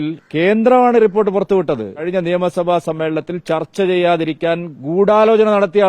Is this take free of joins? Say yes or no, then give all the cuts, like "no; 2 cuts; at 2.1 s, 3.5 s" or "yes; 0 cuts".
no; 1 cut; at 2.0 s